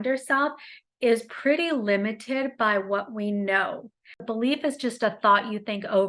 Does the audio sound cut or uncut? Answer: cut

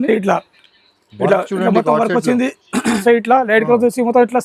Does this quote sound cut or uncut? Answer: cut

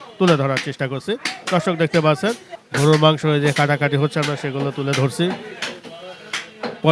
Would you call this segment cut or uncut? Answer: uncut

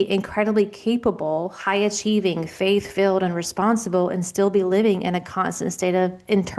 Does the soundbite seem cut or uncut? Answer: uncut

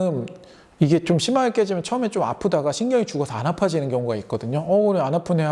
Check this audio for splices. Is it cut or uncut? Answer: uncut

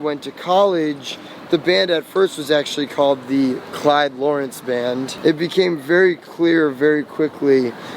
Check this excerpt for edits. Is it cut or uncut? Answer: cut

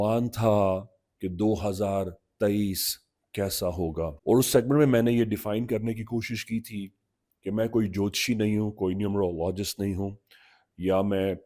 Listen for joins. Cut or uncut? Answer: cut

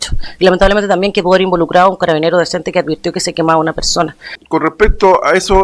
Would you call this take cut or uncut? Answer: cut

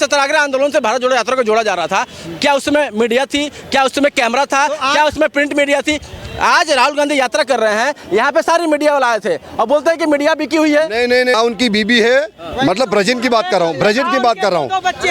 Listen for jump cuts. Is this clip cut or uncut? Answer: cut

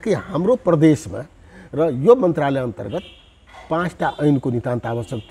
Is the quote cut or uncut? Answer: uncut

